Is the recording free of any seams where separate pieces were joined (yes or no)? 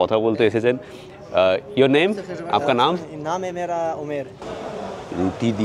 no